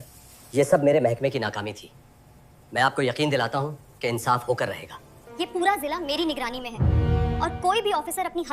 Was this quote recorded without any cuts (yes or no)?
no